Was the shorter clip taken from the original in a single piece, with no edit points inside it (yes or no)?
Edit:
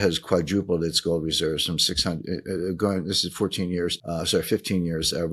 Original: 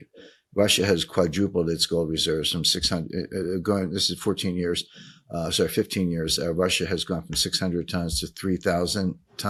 no